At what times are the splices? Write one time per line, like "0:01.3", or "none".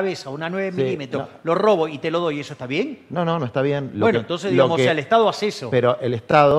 none